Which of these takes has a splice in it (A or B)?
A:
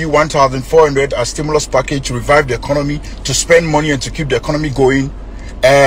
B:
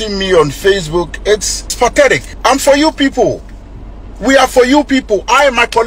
B